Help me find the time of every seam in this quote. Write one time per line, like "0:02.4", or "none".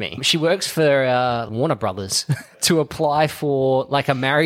none